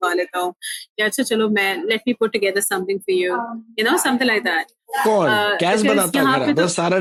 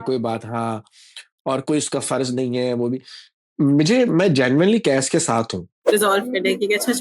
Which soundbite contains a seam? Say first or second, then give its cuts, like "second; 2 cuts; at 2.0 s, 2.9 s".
second; 1 cut; at 5.7 s